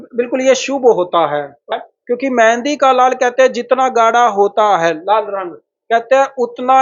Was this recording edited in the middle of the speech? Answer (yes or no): yes